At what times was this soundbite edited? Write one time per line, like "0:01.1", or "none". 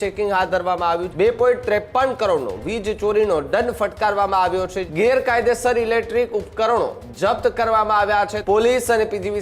0:01.1
0:04.8
0:08.4